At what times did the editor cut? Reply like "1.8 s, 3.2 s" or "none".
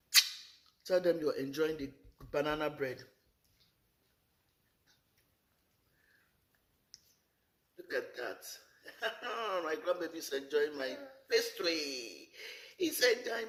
none